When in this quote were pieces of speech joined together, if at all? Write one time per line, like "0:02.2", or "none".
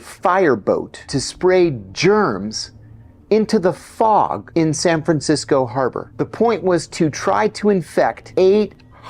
0:01.2
0:04.4
0:06.0
0:08.2

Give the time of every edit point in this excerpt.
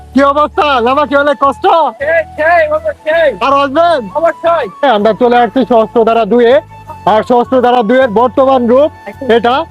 0:04.8

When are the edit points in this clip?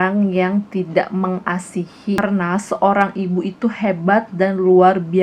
0:02.2

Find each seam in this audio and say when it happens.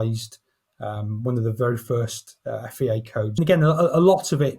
0:03.4

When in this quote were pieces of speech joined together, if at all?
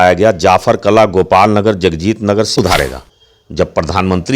0:02.5

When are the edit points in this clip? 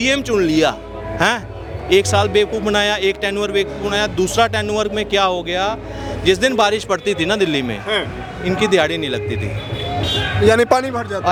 none

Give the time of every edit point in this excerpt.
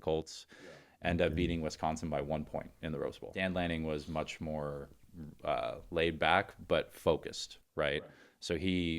0:03.2

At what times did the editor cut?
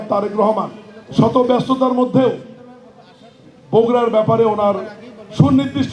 none

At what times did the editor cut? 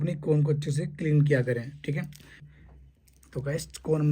0:02.5

